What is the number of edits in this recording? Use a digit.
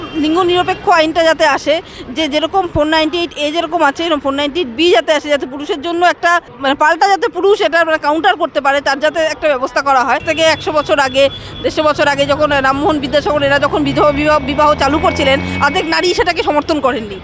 2